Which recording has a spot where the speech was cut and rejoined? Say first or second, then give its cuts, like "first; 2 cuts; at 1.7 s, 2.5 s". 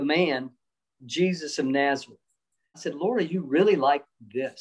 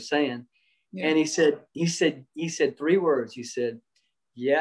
first; 1 cut; at 2.8 s